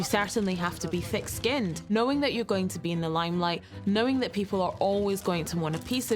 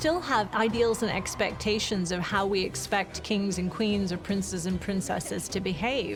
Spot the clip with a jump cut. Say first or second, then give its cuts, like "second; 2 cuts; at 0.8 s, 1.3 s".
first; 1 cut; at 1.8 s